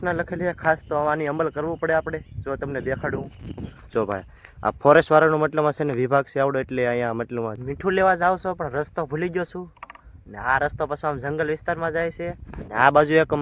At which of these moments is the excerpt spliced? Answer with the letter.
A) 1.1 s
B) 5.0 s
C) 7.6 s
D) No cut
C